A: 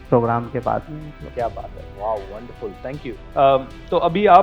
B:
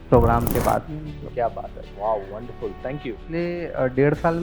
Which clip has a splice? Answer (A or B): B